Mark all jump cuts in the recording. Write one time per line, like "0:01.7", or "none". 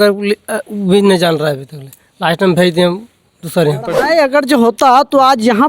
0:03.9